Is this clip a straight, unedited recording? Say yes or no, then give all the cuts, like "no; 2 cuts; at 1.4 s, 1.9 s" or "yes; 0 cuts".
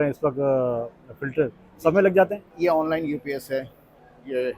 no; 1 cut; at 2.4 s